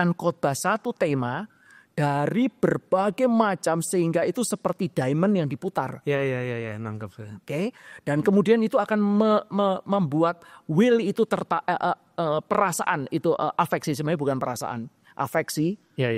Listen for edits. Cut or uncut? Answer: uncut